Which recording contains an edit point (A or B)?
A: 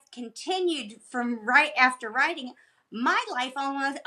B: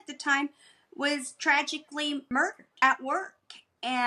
B